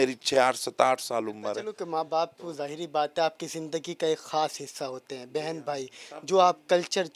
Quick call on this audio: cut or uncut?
cut